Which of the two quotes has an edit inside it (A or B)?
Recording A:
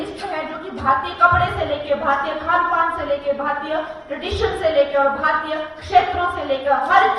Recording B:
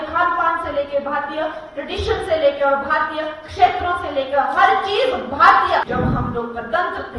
B